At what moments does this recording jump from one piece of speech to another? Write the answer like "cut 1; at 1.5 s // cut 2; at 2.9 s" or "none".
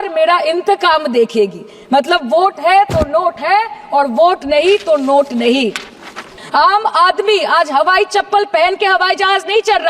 cut 1; at 6.3 s

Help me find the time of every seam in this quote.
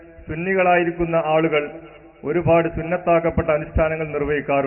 none

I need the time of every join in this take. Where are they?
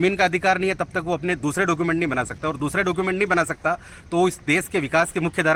none

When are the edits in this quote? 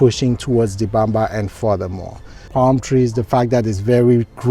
cut 1; at 2.4 s

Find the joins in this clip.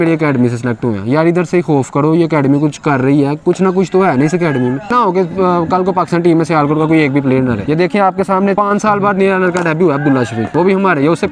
cut 1; at 4.9 s // cut 2; at 7.6 s // cut 3; at 8.5 s // cut 4; at 10.4 s

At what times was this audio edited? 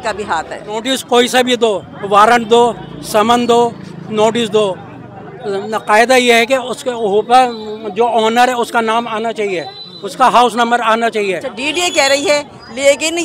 cut 1; at 0.9 s // cut 2; at 11.7 s

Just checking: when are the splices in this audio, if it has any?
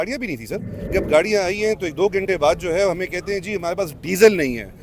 cut 1; at 0.9 s

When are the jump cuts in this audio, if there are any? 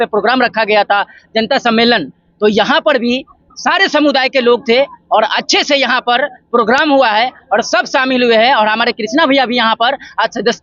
none

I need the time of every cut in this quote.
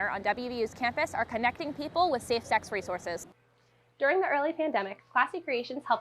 cut 1; at 3.3 s

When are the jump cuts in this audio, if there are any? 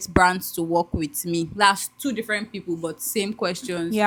none

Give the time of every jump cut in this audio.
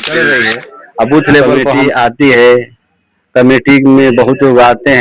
cut 1; at 1.6 s

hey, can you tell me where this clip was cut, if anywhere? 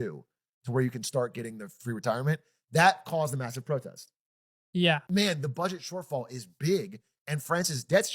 cut 1; at 5.1 s

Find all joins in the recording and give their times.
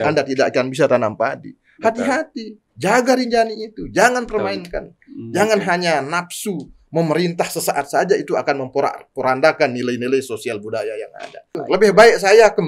cut 1; at 11.6 s

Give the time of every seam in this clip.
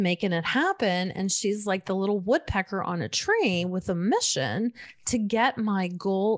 none

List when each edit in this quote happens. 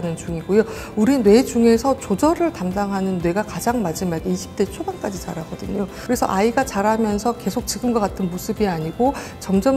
cut 1; at 6.0 s

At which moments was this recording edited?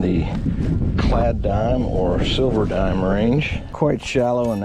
cut 1; at 3.6 s

